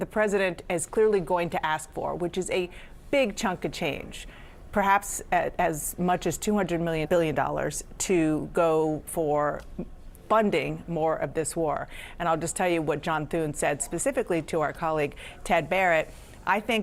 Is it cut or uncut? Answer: uncut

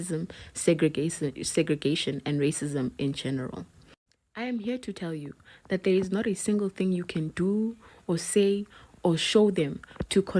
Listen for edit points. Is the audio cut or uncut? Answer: uncut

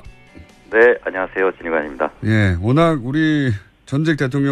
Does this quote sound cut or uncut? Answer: uncut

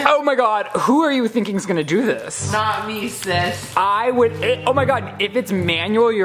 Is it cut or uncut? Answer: uncut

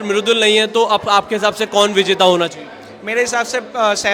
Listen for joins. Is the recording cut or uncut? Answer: uncut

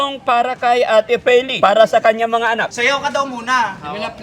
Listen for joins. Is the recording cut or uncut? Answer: cut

